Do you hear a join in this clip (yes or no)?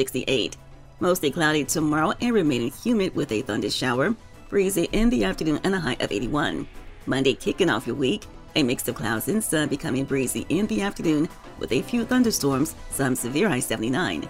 no